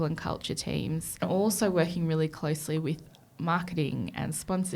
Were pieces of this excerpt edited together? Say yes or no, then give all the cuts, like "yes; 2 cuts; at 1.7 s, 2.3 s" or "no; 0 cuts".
yes; 1 cut; at 1.2 s